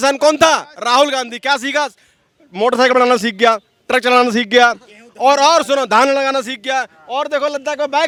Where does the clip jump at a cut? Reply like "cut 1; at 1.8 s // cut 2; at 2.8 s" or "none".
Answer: none